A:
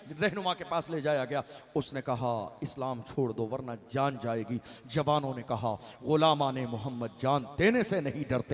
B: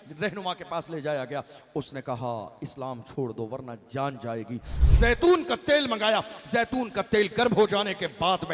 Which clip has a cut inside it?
B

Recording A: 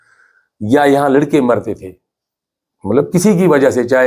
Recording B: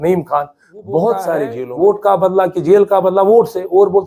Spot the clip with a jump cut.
B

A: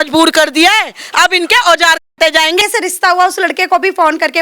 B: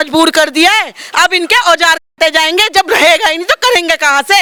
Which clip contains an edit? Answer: A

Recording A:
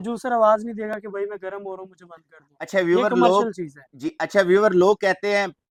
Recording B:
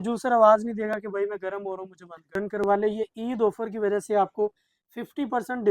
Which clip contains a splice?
B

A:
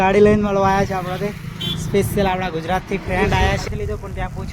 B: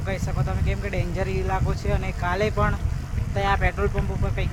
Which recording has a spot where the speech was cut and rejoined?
A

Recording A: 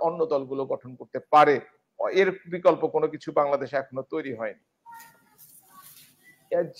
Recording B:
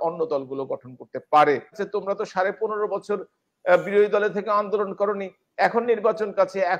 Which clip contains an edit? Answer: B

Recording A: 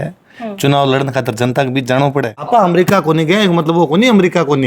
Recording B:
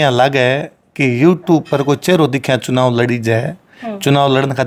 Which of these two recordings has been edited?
A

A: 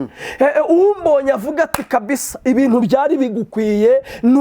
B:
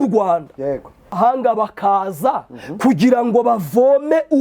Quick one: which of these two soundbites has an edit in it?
B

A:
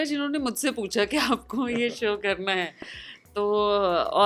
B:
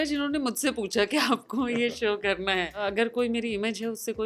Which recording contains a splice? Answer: B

